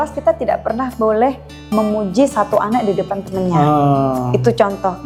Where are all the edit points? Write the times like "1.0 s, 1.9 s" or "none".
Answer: none